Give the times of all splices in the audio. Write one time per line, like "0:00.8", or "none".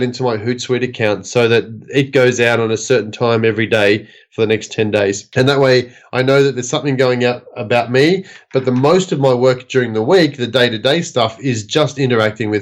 0:05.2